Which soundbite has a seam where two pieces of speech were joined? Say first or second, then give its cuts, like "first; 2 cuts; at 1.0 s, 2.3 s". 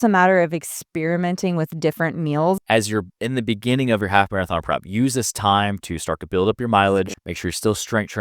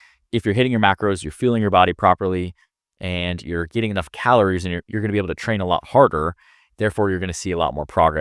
first; 2 cuts; at 2.6 s, 7.2 s